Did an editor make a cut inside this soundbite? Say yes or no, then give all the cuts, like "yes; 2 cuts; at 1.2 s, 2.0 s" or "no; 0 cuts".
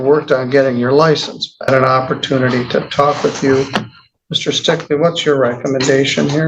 yes; 1 cut; at 1.7 s